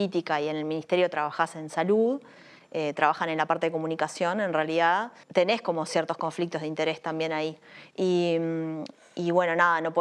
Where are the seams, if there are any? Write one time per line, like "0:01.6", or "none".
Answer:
0:05.2